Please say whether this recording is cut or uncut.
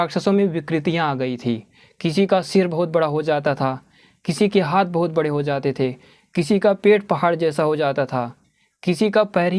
uncut